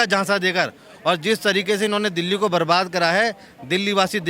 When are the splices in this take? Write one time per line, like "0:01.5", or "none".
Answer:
none